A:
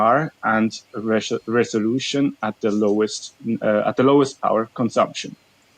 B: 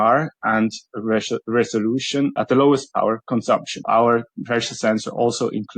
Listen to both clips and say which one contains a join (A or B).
B